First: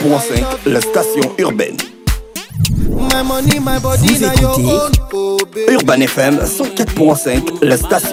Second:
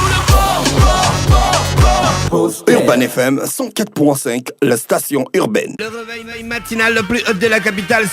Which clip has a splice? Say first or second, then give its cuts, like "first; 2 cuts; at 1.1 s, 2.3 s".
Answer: second; 1 cut; at 5.8 s